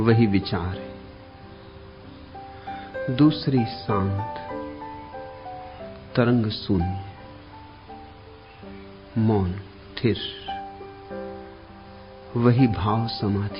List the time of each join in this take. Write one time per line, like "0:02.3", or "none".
0:04.2
0:05.4